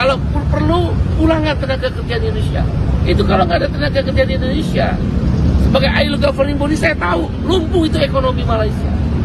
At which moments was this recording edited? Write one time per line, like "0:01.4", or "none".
none